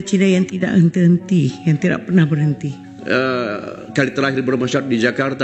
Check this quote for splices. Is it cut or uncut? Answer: cut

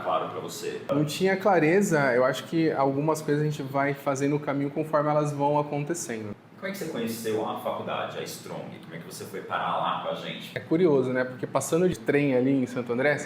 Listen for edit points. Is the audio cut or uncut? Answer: cut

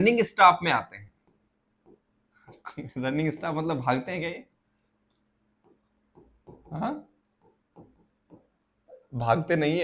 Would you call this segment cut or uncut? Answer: uncut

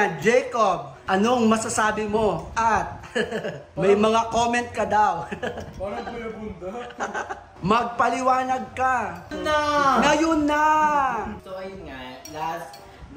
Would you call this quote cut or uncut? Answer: cut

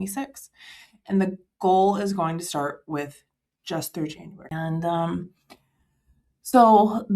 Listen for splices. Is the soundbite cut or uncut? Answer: cut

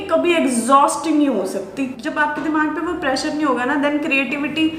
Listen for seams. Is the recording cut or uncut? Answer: cut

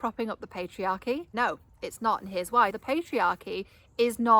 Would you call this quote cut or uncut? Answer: cut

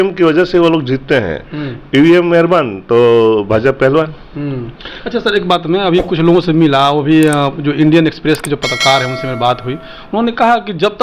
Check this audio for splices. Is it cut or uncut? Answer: uncut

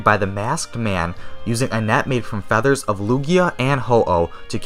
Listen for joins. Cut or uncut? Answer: uncut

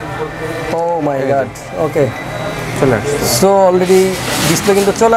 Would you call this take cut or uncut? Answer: uncut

